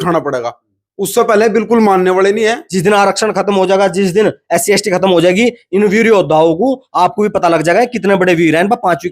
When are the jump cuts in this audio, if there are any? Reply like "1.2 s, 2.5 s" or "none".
2.7 s